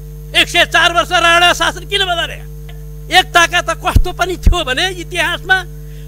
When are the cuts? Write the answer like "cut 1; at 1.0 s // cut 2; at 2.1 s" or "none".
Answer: cut 1; at 2.9 s